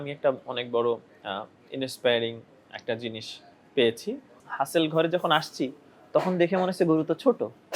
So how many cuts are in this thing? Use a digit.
1